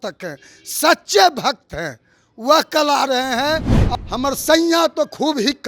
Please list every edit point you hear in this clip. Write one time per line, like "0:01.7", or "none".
0:03.8